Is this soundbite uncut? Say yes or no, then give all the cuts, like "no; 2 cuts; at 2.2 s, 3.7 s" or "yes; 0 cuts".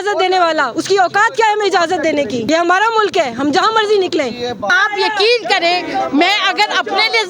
no; 2 cuts; at 2.4 s, 4.7 s